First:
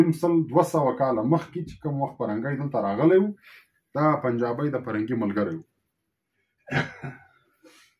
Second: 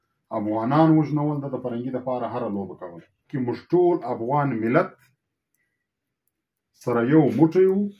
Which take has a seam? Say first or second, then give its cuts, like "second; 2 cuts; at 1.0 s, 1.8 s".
second; 1 cut; at 3.3 s